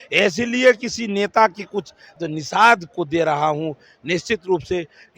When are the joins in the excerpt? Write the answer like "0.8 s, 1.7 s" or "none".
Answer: 2.0 s